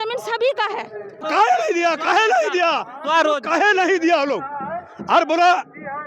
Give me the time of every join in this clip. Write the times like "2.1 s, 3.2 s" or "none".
1.3 s